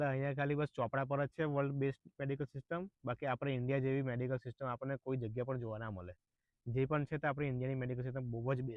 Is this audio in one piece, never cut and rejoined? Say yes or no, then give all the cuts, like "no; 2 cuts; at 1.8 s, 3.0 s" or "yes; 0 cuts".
yes; 0 cuts